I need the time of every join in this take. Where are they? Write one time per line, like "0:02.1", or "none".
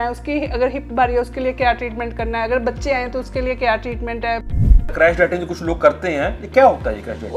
0:04.8